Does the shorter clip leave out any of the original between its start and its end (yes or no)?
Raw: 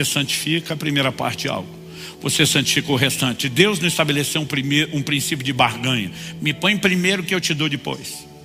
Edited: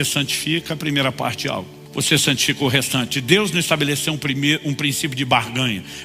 yes